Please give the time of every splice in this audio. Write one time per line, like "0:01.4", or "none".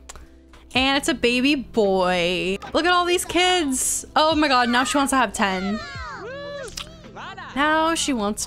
0:02.6

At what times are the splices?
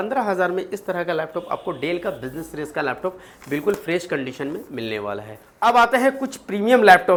none

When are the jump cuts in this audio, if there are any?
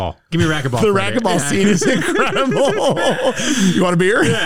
none

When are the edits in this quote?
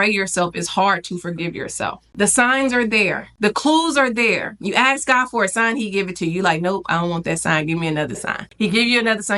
0:02.0
0:03.3
0:08.4

